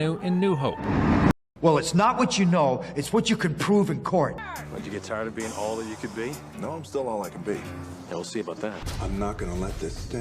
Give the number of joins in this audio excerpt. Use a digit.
1